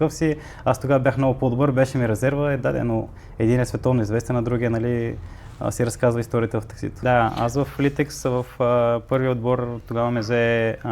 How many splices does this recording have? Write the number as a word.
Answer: one